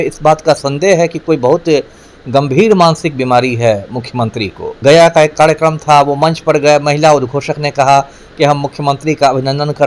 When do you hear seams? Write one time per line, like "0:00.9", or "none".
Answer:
0:04.6